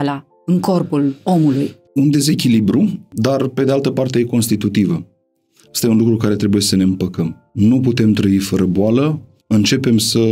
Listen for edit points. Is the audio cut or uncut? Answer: cut